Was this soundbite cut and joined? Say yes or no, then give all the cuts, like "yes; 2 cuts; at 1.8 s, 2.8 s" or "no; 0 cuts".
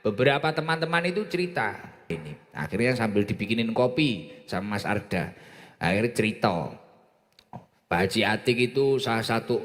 yes; 1 cut; at 2.1 s